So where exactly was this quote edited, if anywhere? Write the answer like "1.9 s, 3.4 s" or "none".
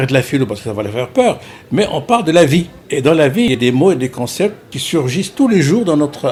none